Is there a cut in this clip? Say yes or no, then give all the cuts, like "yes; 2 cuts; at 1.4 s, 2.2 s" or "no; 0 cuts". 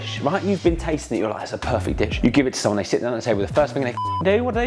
yes; 1 cut; at 2.1 s